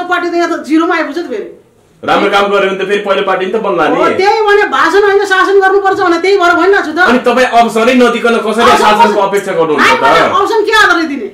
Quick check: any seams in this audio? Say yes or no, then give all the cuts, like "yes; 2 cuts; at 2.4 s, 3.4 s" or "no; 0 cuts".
no; 0 cuts